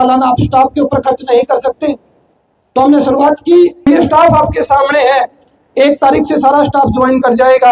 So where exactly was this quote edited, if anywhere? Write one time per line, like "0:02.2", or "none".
0:03.9